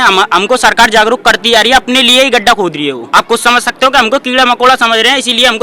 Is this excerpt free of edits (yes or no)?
no